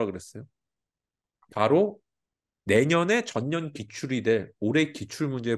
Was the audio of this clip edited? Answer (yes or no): no